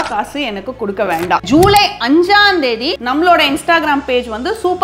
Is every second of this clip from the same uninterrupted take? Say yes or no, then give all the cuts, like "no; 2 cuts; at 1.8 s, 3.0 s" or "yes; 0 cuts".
no; 2 cuts; at 1.4 s, 3.0 s